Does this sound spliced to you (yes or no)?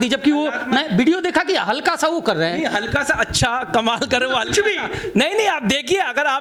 no